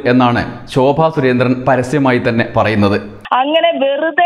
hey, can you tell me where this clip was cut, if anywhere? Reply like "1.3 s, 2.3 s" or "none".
3.2 s